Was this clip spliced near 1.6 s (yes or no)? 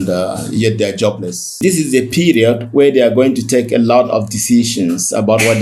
yes